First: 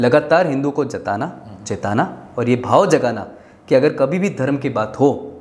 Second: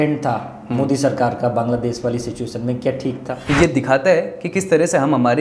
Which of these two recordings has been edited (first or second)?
second